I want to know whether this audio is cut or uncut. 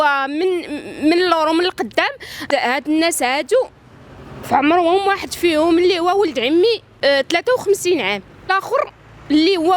cut